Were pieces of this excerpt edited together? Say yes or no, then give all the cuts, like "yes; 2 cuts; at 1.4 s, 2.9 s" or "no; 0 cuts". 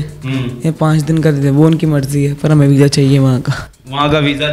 no; 0 cuts